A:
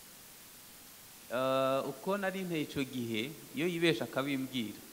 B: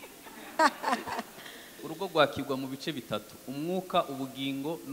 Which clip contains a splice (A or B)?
B